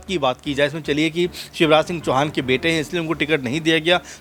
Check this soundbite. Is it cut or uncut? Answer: uncut